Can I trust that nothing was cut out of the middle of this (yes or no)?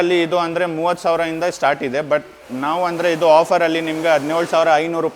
yes